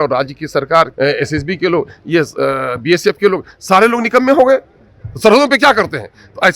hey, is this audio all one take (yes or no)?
no